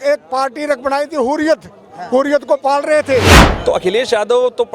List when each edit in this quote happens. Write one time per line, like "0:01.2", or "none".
0:03.4